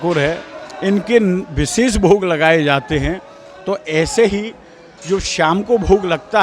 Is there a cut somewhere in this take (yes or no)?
no